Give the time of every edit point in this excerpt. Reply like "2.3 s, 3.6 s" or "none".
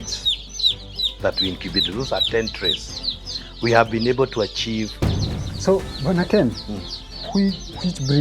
5.4 s